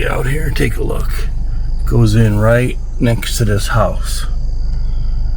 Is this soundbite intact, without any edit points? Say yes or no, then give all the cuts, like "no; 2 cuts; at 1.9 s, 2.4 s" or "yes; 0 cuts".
yes; 0 cuts